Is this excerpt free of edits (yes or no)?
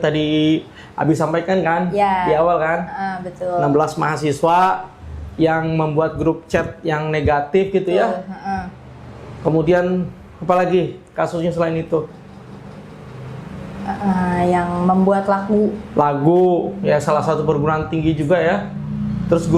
yes